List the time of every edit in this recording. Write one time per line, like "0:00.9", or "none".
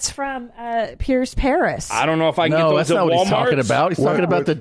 none